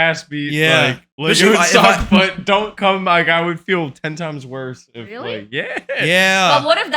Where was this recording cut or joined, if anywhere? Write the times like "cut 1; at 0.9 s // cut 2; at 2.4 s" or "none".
cut 1; at 1.1 s